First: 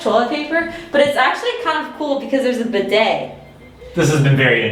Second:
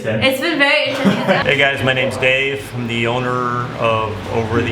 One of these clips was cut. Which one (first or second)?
second